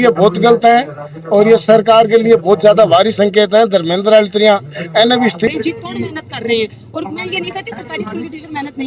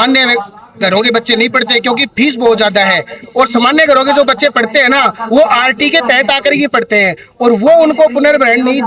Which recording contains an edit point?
first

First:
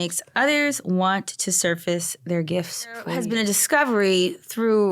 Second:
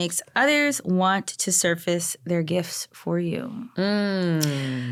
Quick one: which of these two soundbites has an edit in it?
first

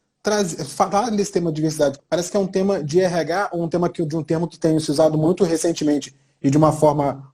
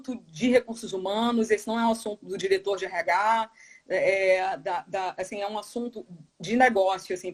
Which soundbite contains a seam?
first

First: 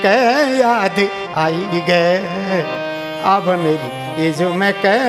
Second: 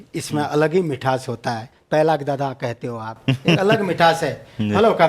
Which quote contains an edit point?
second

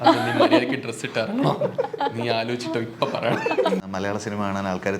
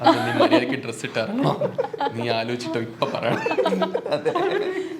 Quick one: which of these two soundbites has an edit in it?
first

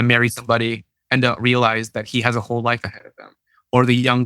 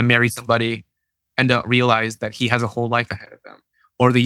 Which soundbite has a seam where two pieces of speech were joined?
first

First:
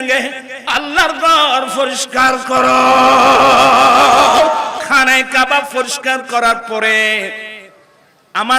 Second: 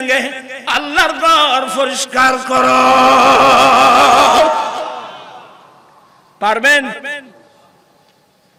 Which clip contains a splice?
first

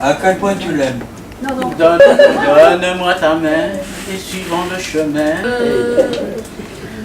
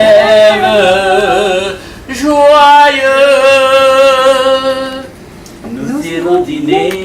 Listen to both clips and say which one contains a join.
first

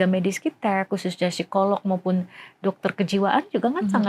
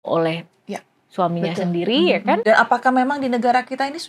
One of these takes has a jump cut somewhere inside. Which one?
second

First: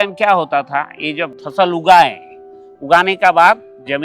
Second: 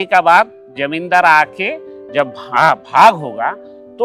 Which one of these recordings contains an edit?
first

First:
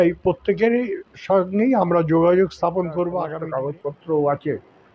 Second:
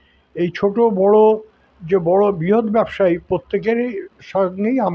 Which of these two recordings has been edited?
first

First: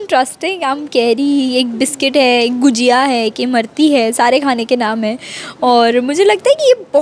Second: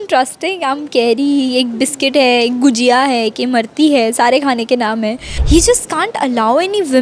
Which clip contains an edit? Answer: second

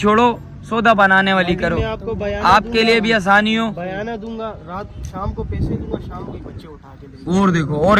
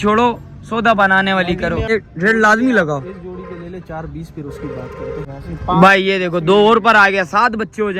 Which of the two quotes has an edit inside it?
second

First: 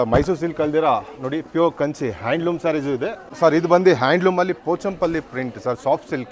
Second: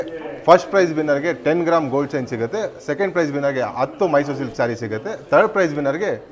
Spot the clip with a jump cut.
first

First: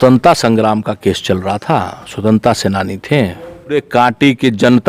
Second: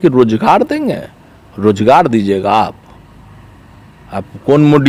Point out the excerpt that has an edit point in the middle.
first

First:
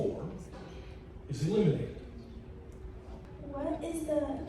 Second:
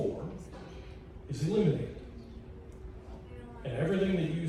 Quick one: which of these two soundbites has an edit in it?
first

